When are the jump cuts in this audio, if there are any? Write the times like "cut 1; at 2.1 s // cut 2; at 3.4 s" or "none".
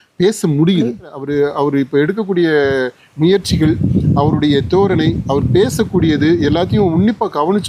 cut 1; at 1.2 s